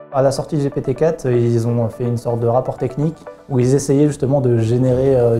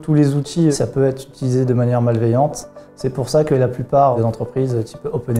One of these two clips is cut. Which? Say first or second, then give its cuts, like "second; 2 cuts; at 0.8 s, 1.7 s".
second; 2 cuts; at 0.7 s, 4.2 s